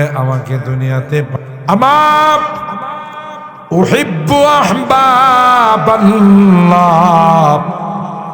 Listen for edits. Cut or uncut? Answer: cut